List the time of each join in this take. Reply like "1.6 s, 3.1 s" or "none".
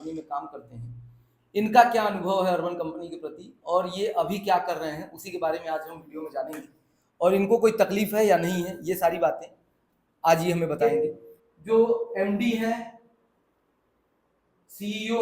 10.8 s